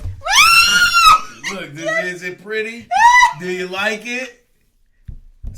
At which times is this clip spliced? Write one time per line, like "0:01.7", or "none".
0:01.3